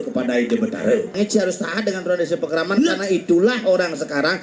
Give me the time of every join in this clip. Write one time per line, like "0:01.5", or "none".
0:01.1

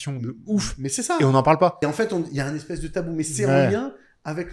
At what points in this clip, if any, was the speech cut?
0:01.8

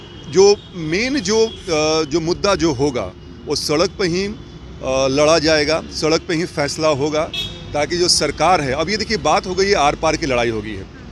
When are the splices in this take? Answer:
none

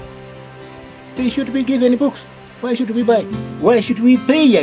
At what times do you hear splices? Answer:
0:03.4

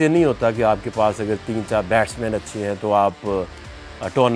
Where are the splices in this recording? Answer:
none

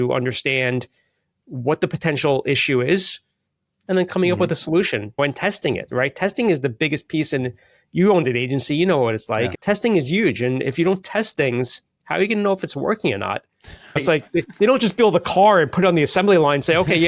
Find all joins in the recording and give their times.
0:05.2
0:09.6
0:14.0

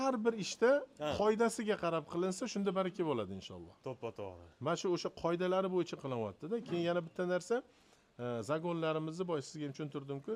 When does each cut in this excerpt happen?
none

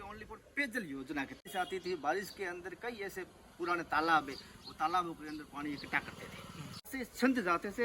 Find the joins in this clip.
0:01.5
0:06.8

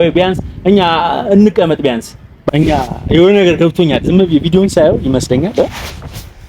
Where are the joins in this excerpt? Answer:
0:02.5

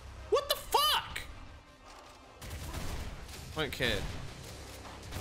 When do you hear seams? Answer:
0:02.7

